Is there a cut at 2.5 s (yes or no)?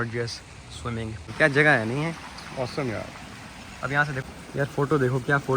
no